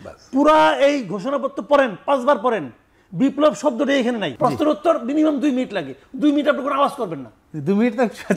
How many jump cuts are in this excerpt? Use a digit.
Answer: 1